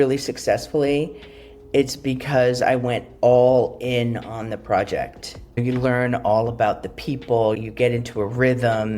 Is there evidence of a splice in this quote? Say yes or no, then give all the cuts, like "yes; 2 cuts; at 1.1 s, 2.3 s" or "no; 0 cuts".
yes; 2 cuts; at 5.6 s, 7.6 s